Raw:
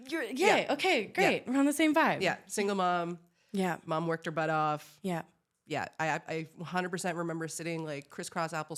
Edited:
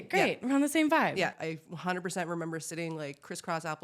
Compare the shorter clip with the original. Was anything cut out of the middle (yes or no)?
yes